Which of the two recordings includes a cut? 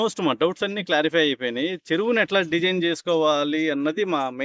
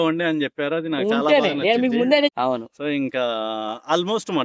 second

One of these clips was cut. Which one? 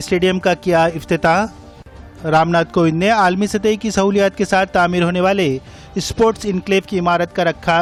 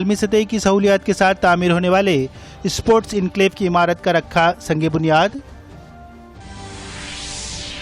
second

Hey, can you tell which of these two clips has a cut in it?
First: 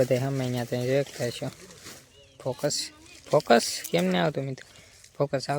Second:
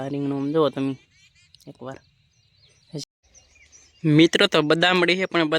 second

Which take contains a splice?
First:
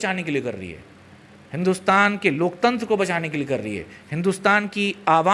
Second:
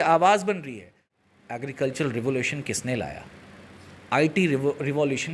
second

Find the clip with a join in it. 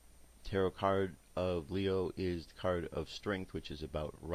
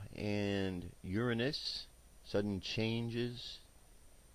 first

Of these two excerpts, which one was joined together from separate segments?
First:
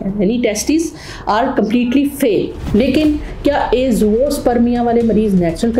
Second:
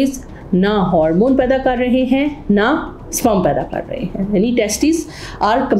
first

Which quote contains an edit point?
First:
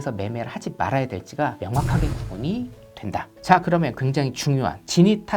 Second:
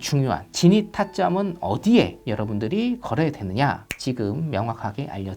first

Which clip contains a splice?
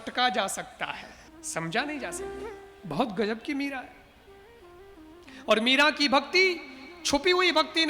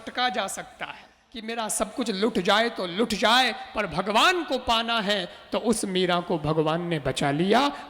second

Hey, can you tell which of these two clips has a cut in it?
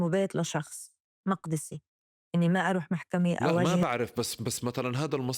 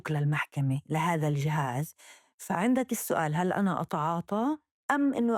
first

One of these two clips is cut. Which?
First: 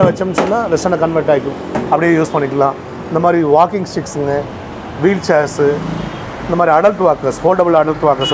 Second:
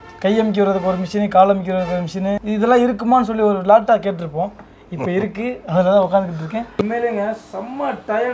second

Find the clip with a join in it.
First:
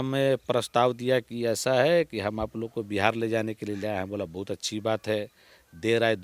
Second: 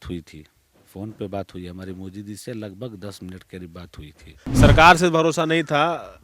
second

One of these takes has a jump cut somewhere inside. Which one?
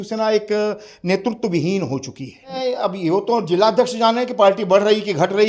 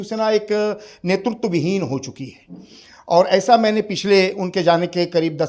first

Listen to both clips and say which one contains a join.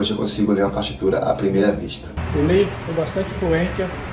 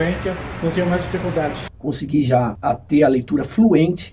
second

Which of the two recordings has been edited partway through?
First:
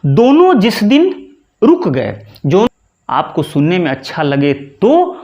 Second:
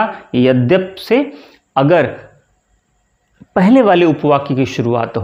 first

